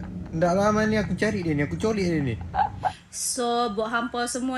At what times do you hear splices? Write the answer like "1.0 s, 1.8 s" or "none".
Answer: 3.0 s